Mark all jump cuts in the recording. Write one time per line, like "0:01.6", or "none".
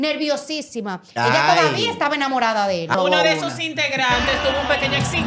0:02.9